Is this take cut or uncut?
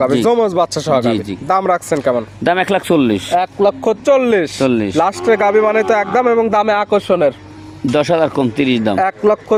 uncut